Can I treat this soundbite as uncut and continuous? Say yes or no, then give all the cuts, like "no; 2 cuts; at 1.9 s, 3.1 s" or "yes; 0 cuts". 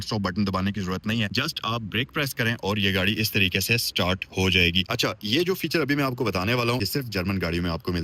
no; 3 cuts; at 1.3 s, 4.9 s, 6.8 s